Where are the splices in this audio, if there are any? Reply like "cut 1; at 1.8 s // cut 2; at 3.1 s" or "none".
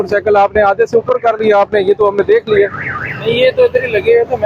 none